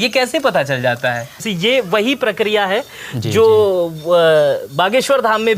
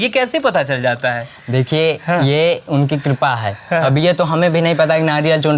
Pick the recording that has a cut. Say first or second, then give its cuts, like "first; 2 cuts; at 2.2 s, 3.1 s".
first; 1 cut; at 1.4 s